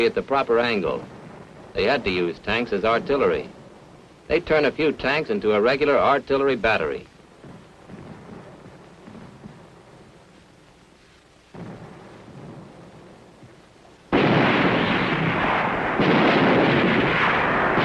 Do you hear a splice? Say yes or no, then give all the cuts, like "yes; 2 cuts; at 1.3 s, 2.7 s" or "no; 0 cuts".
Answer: yes; 1 cut; at 4.6 s